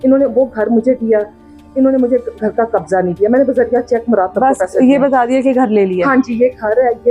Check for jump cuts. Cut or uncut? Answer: uncut